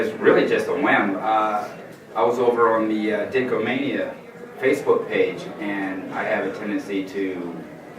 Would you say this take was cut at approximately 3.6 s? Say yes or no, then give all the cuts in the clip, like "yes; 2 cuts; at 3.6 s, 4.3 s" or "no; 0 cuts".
no; 1 cut; at 5.8 s